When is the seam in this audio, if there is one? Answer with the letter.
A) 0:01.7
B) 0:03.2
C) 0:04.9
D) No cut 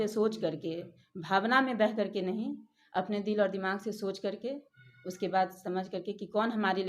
D